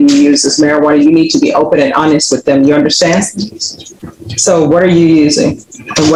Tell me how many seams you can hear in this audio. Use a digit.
0